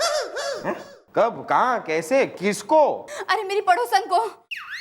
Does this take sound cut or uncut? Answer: cut